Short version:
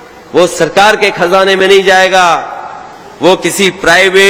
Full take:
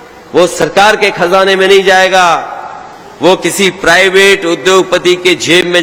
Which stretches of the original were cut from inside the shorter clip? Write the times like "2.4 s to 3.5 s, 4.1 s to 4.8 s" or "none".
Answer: none